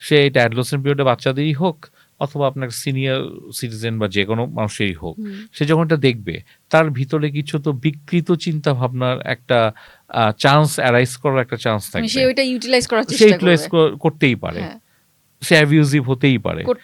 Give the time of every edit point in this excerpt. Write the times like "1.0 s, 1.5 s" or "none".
none